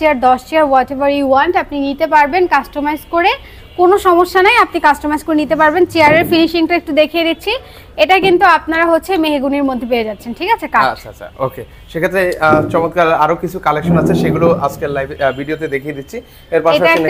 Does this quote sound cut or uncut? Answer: uncut